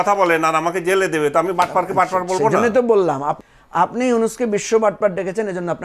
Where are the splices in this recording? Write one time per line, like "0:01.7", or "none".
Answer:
0:03.4

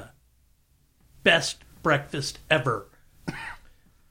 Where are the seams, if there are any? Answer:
none

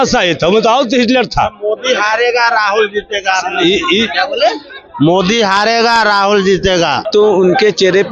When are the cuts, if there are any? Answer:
0:07.0

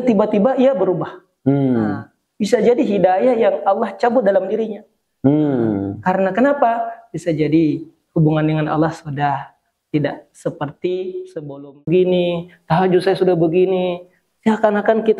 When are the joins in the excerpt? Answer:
0:11.9

